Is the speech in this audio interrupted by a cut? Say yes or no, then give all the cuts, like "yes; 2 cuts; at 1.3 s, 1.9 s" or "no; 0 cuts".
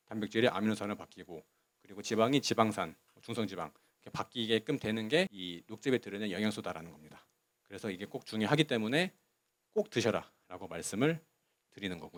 no; 0 cuts